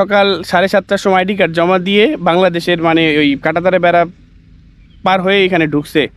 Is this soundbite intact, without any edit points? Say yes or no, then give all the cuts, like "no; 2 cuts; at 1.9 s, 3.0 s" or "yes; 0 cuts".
yes; 0 cuts